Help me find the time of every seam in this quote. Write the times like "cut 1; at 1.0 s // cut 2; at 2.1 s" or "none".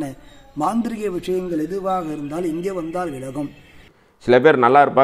cut 1; at 3.9 s